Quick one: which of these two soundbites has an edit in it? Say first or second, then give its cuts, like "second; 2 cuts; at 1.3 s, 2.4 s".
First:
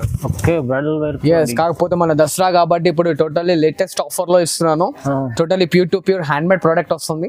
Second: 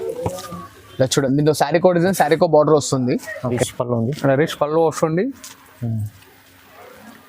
second; 1 cut; at 3.6 s